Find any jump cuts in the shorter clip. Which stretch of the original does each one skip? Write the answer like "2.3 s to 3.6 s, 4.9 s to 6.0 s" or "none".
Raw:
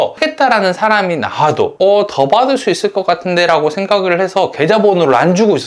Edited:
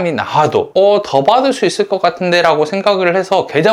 none